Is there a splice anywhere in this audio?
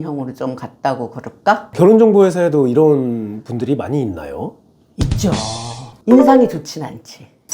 yes; 1 cut; at 6.0 s

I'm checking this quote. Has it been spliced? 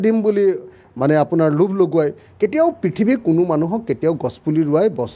no; 0 cuts

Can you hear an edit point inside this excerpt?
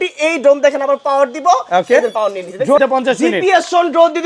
yes; 1 cut; at 2.8 s

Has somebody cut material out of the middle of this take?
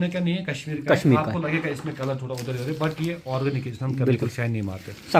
no; 0 cuts

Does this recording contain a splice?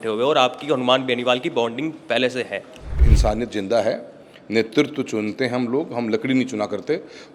yes; 1 cut; at 3.1 s

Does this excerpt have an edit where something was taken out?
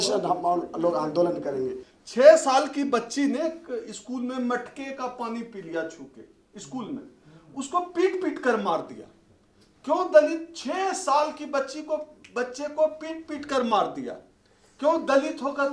yes; 1 cut; at 1.9 s

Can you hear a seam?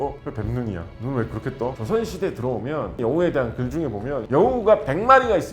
yes; 3 cuts; at 1.8 s, 3.0 s, 4.2 s

